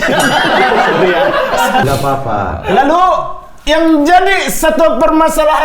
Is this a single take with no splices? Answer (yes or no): no